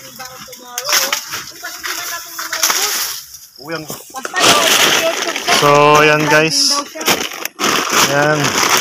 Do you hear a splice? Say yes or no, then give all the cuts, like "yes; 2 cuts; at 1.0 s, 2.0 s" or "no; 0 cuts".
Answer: yes; 1 cut; at 3.9 s